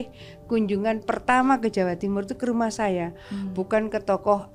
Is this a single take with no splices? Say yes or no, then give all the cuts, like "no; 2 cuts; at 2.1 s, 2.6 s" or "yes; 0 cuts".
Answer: yes; 0 cuts